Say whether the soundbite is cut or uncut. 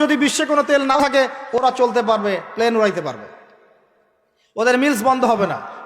cut